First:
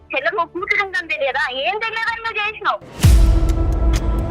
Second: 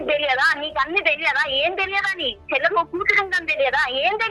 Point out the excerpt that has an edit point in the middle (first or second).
first